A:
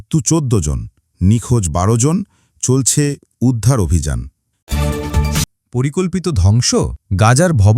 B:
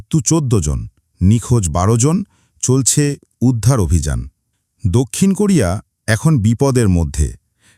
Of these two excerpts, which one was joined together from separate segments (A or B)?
A